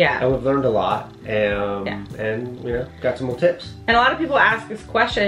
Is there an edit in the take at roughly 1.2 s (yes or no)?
no